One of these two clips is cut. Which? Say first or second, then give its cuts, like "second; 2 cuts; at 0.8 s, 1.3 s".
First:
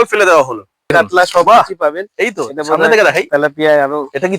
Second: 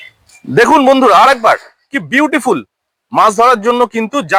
first; 1 cut; at 0.9 s